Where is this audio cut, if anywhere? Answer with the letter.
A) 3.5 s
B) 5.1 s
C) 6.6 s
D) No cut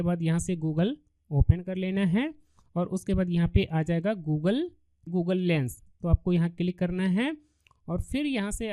B